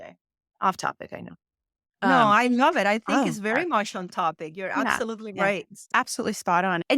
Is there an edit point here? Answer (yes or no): yes